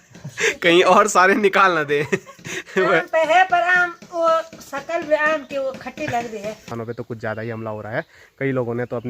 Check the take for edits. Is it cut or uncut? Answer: cut